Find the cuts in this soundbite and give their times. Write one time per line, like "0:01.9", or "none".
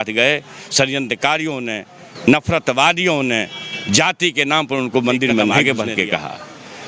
0:05.6